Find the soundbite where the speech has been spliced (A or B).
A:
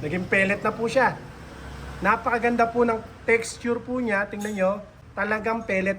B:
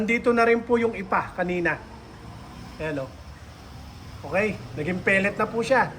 A